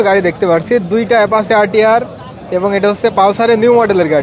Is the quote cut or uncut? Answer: uncut